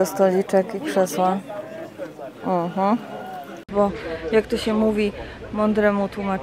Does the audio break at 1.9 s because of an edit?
no; 1 cut; at 3.6 s

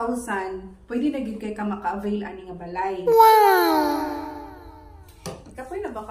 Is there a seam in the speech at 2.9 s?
yes; 1 cut; at 2.9 s

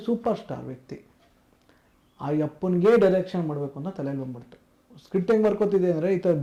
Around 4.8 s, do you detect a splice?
no; 0 cuts

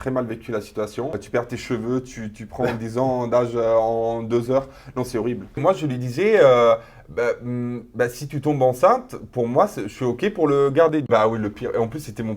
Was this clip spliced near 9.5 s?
no; 3 cuts; at 1.2 s, 5.6 s, 11.1 s

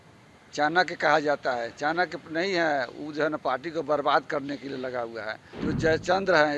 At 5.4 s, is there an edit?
yes; 1 cut; at 5.4 s

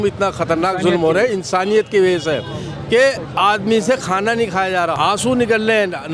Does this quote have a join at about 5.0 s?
yes; 1 cut; at 5.0 s

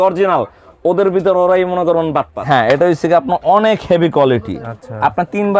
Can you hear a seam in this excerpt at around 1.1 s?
no; 1 cut; at 2.4 s

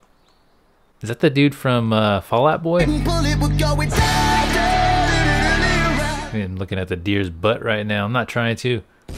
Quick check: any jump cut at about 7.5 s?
no; 2 cuts; at 2.9 s, 6.1 s

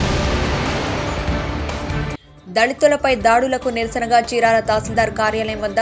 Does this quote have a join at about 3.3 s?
no; 1 cut; at 2.0 s

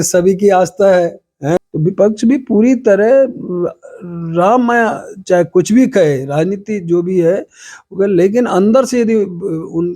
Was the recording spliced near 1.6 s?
yes; 1 cut; at 1.6 s

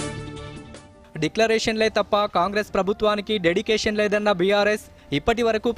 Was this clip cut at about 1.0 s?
yes; 1 cut; at 1.0 s

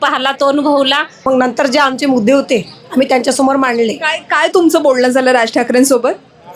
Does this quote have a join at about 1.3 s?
yes; 1 cut; at 1.3 s

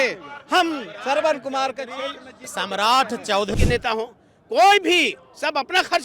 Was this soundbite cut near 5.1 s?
no; 1 cut; at 3.5 s

